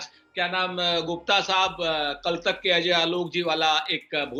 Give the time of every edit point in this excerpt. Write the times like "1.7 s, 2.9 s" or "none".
none